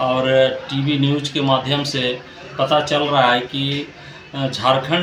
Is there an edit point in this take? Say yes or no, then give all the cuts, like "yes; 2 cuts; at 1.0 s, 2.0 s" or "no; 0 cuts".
no; 0 cuts